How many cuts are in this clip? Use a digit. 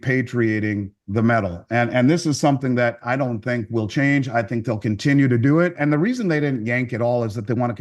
1